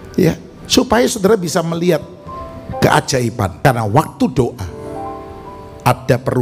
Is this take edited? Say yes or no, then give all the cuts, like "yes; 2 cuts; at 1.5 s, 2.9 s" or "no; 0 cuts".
yes; 1 cut; at 3.5 s